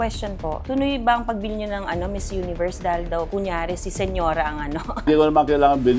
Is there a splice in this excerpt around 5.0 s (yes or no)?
yes